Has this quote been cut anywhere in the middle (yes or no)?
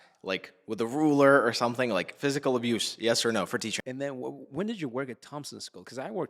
yes